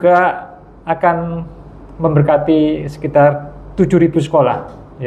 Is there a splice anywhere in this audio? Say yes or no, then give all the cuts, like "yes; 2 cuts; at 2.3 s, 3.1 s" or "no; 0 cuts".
no; 0 cuts